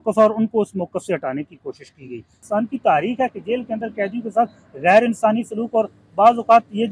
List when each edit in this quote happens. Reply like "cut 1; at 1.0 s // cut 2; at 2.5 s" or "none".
cut 1; at 2.4 s